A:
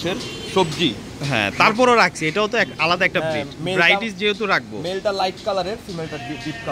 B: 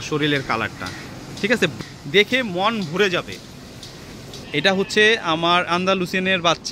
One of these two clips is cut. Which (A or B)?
B